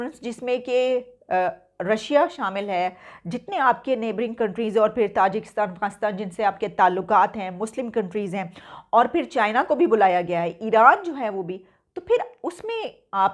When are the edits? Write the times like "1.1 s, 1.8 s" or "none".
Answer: none